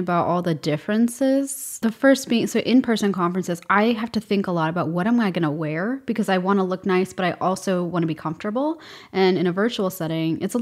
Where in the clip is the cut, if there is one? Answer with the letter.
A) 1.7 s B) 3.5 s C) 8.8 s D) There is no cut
A